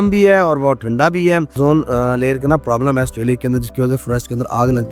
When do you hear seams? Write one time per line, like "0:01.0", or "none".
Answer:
0:01.5